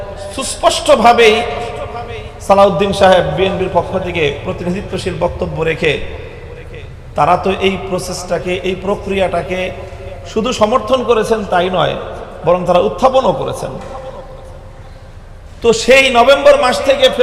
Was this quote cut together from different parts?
no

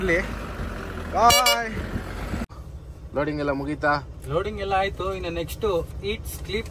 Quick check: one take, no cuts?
no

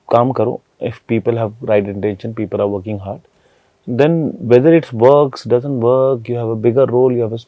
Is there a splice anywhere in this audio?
no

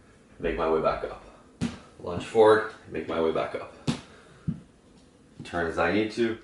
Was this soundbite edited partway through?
no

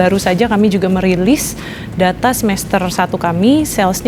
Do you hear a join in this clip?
no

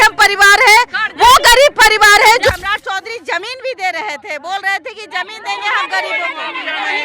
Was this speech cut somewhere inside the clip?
yes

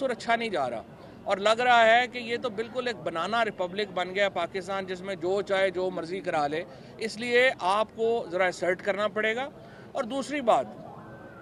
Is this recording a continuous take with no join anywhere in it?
yes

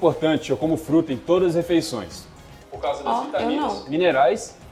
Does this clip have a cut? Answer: no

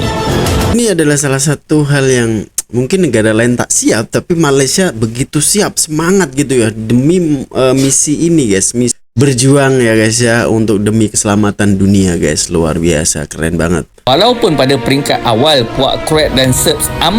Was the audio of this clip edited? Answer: yes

